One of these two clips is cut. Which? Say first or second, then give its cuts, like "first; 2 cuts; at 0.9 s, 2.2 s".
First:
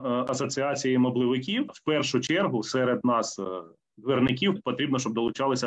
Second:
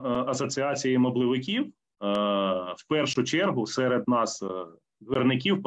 first; 2 cuts; at 1.8 s, 4.6 s